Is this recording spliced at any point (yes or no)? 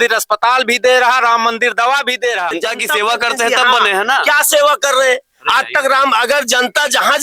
yes